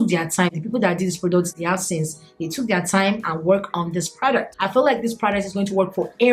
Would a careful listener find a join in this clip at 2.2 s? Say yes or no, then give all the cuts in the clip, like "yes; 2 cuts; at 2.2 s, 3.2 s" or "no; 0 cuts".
no; 1 cut; at 4.5 s